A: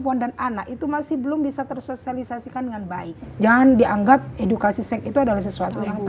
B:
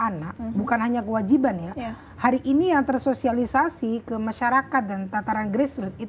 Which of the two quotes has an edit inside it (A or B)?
A